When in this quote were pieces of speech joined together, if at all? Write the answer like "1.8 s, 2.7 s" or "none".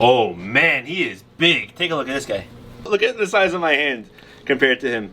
2.9 s